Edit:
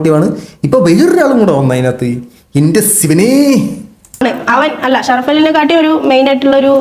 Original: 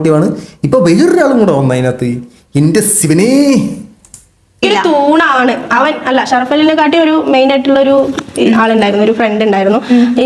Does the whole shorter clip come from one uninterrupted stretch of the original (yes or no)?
no